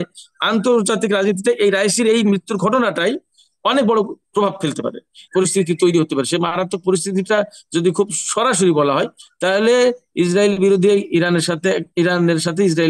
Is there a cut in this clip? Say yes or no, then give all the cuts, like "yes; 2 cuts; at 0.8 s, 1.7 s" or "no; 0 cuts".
yes; 1 cut; at 5.2 s